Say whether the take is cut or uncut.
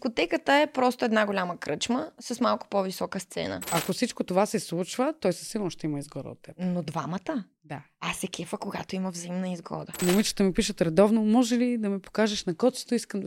cut